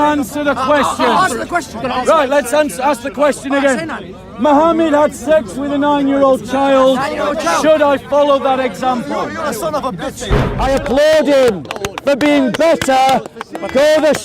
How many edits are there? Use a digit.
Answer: 1